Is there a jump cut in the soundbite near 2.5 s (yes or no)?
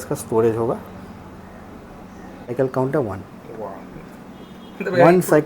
yes